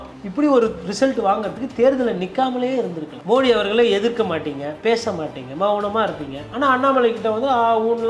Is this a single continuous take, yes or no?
no